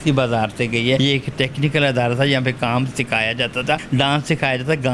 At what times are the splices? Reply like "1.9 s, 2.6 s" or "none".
1.0 s, 3.8 s